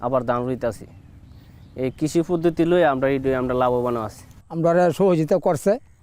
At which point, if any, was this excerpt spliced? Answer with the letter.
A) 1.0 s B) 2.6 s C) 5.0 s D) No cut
D